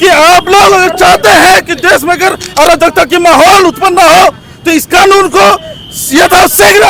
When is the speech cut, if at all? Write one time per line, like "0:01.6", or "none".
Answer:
none